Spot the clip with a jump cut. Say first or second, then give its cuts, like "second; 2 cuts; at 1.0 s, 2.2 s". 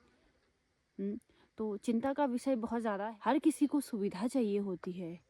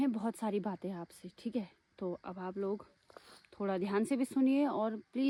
first; 1 cut; at 3.1 s